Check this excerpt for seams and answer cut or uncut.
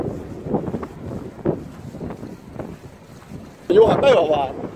cut